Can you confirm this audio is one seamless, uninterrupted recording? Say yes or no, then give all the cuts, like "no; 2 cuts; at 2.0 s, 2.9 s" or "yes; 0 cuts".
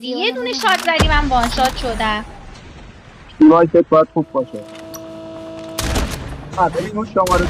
no; 1 cut; at 4.5 s